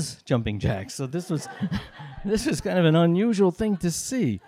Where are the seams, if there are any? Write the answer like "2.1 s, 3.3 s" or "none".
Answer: none

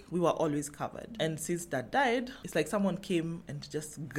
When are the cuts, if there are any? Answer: 2.4 s

